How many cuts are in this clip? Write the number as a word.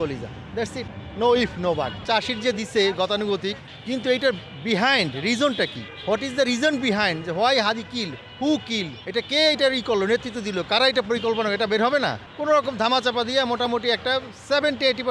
two